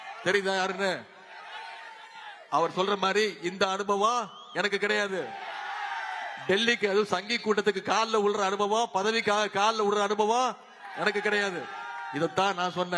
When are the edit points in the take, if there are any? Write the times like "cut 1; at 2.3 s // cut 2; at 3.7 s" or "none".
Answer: none